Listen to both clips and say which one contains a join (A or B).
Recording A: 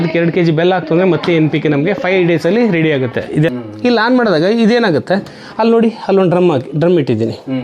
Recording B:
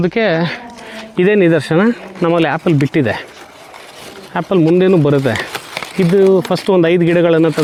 A